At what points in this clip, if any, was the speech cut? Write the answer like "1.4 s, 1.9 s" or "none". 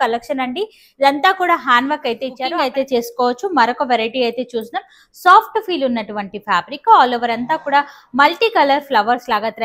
2.5 s

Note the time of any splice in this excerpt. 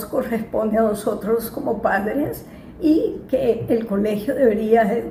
none

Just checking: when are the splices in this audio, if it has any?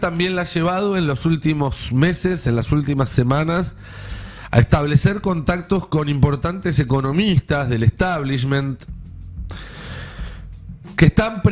none

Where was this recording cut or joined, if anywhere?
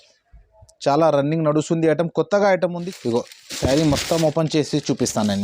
2.8 s

